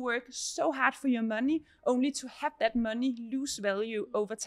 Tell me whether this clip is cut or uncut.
uncut